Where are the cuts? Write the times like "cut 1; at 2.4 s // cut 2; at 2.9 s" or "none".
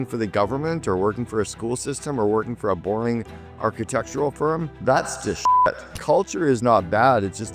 cut 1; at 4.7 s // cut 2; at 5.9 s